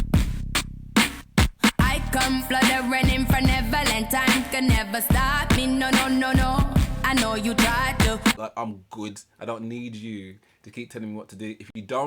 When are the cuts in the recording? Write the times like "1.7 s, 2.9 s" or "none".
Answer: 8.4 s